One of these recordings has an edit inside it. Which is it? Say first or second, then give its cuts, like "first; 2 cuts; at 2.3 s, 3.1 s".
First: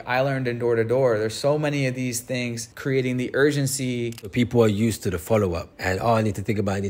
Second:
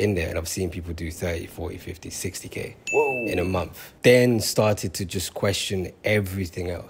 first; 3 cuts; at 2.7 s, 4.3 s, 5.7 s